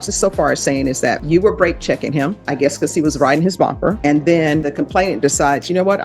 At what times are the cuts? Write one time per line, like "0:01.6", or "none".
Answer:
0:01.2
0:04.0
0:04.7